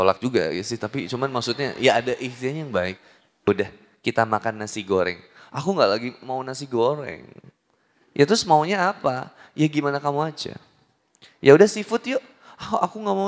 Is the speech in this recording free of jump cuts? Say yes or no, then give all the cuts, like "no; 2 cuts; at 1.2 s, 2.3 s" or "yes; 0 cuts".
no; 1 cut; at 3.5 s